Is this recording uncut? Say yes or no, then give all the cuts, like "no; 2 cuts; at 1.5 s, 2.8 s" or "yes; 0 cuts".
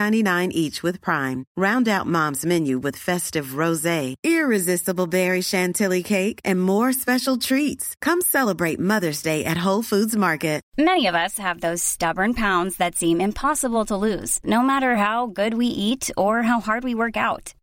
yes; 0 cuts